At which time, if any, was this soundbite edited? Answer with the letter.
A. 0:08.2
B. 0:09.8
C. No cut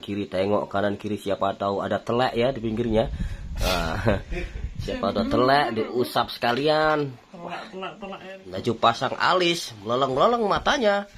A